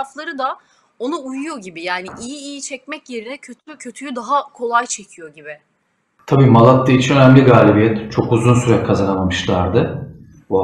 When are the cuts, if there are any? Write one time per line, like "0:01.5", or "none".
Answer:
0:06.1